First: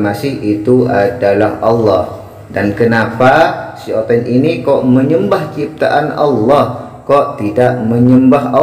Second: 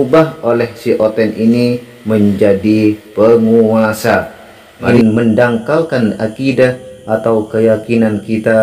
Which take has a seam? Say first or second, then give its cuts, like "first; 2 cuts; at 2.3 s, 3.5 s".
second; 1 cut; at 4.9 s